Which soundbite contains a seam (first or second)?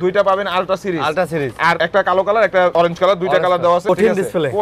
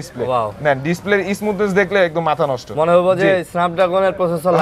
first